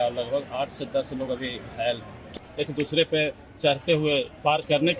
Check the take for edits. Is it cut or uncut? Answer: cut